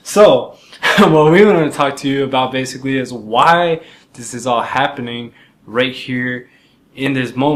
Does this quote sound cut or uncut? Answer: uncut